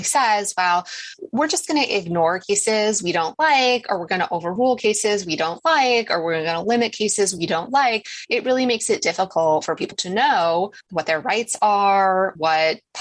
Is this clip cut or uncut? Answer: uncut